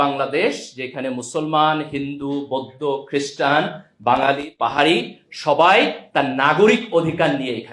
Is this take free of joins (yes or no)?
yes